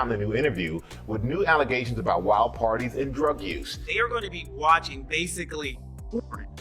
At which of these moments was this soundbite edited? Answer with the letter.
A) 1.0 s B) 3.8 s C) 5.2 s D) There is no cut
B